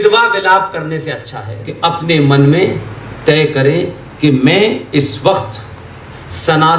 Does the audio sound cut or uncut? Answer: cut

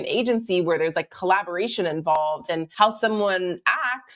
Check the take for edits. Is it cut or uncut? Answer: cut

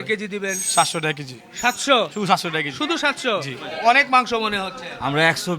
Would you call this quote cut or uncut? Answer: cut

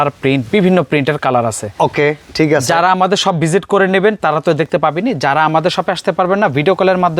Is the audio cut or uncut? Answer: uncut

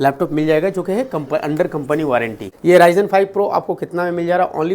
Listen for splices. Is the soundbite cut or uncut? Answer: cut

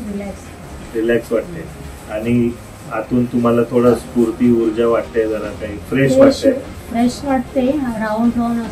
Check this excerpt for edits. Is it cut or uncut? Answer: uncut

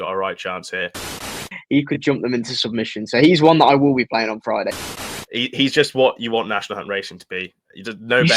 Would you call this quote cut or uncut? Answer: cut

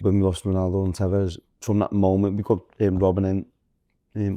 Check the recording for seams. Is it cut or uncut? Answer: cut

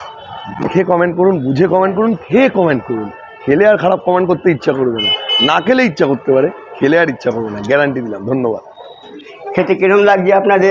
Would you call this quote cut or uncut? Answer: cut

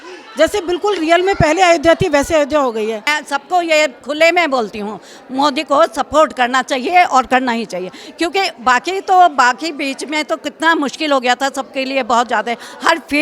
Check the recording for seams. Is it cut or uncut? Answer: cut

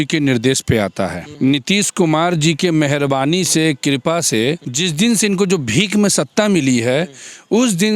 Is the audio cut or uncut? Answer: cut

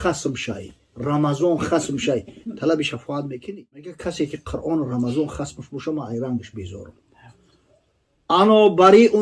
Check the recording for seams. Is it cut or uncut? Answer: cut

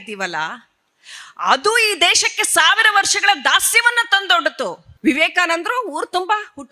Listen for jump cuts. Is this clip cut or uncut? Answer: cut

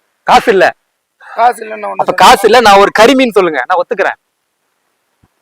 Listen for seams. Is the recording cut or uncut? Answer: cut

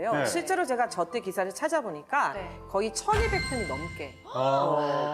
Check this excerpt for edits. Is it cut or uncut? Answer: uncut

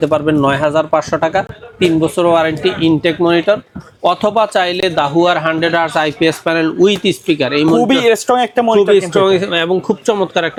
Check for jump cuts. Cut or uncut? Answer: uncut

